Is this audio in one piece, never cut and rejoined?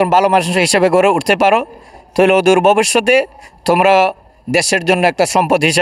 yes; 0 cuts

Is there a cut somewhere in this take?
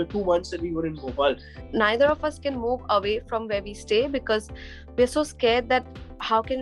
yes; 1 cut; at 1.6 s

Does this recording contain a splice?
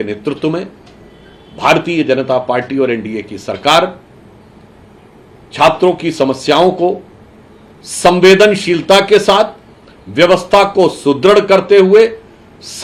no; 0 cuts

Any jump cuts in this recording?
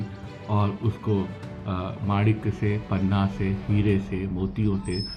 no; 0 cuts

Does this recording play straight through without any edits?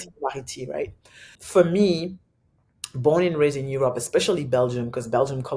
no; 1 cut; at 1.4 s

